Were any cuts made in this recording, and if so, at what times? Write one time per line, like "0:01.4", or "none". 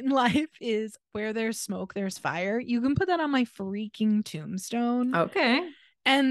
none